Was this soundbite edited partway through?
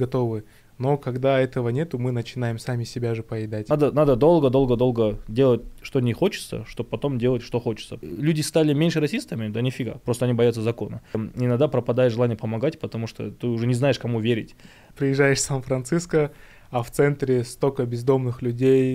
yes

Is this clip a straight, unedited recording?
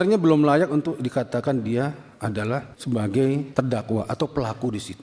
no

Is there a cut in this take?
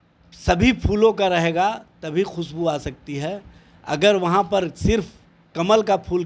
no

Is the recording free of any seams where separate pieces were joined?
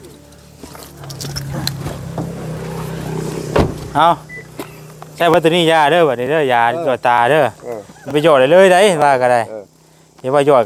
yes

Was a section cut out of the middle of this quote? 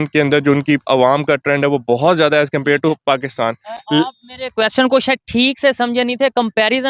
no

